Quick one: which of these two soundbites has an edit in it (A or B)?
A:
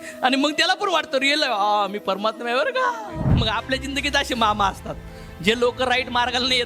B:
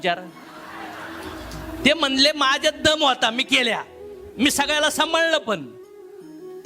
A